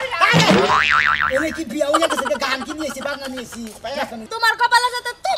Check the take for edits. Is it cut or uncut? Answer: cut